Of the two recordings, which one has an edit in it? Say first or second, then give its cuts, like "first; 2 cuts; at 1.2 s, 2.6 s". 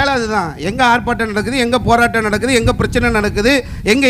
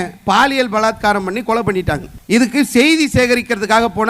second; 1 cut; at 2.3 s